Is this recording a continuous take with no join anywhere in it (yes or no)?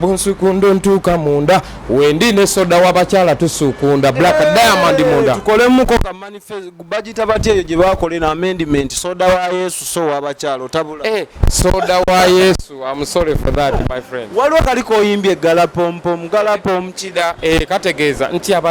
yes